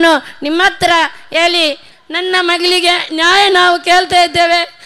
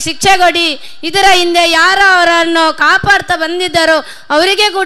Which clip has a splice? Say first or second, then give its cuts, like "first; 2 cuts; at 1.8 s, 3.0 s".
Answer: first; 1 cut; at 1.9 s